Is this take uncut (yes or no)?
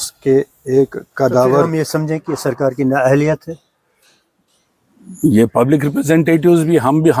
no